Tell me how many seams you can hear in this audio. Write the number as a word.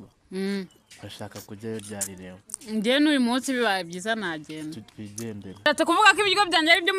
one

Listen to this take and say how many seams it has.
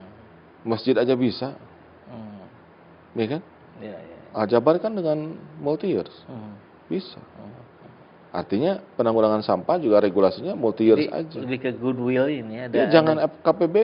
zero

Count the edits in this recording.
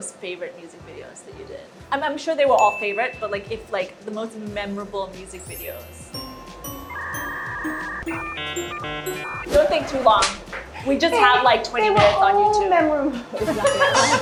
zero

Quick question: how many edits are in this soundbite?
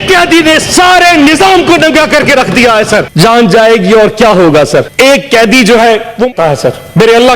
three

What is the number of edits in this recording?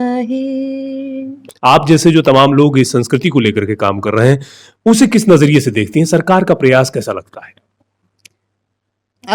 one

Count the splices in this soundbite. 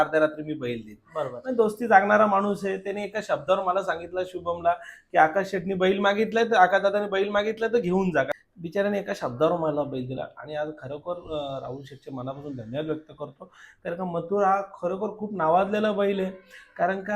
one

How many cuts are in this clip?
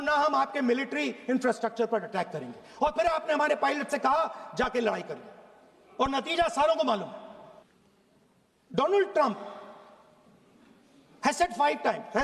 one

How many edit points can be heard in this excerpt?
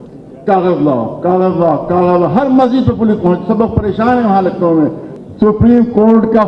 one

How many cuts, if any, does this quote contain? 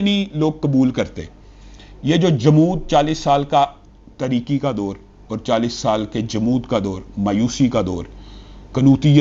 zero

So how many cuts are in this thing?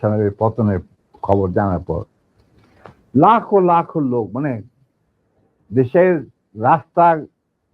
zero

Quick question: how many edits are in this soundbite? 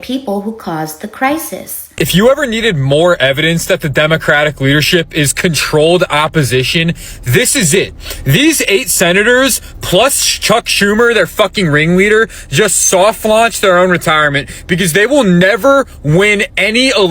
one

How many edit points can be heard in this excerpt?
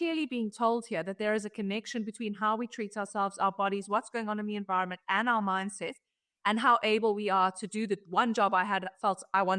zero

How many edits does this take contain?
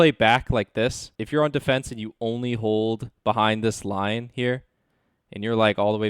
one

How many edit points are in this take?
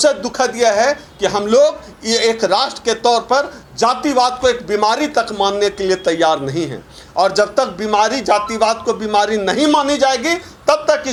zero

